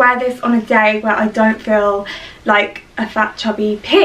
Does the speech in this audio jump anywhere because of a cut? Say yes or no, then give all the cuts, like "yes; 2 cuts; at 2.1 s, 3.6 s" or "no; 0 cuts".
no; 0 cuts